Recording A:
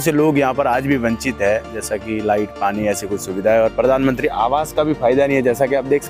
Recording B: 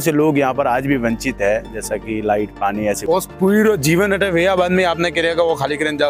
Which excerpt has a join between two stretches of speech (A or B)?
B